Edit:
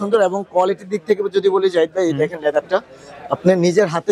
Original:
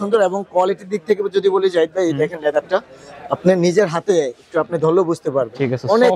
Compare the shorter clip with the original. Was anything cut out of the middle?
no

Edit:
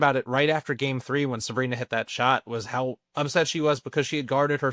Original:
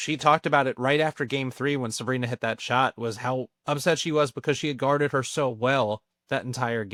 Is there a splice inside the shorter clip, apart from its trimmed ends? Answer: no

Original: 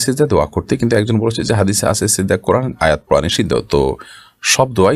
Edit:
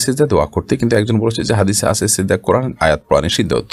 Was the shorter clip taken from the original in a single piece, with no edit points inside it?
yes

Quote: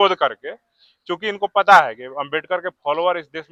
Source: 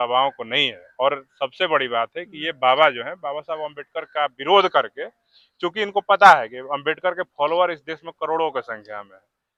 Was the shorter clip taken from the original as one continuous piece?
yes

